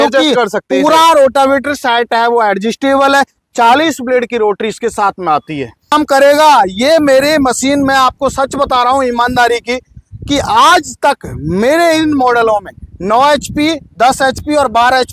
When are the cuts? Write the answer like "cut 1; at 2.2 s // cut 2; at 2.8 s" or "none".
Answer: cut 1; at 5.9 s